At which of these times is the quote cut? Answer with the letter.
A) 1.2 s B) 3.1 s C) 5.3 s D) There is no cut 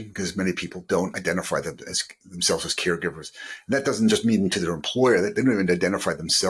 D